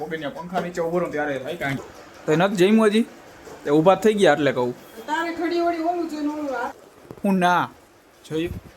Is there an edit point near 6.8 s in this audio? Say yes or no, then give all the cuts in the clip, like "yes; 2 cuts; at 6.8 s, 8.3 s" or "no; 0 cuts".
yes; 2 cuts; at 1.8 s, 6.8 s